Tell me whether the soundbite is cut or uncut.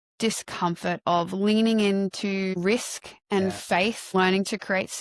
cut